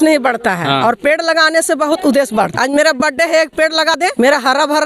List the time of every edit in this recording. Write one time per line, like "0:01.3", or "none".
0:02.5
0:04.0